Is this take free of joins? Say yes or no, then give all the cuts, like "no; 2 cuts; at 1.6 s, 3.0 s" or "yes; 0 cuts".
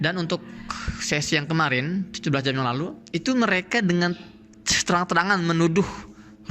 no; 1 cut; at 3.0 s